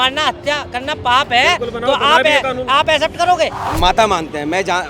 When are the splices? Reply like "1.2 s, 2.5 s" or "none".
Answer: 3.7 s